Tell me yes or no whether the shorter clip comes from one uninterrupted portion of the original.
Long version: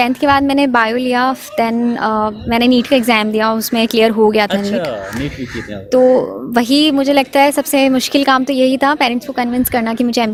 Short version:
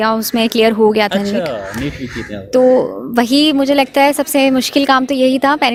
yes